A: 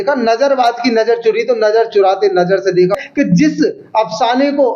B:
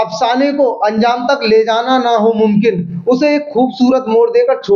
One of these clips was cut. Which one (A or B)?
A